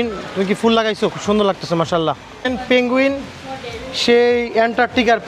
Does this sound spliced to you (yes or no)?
yes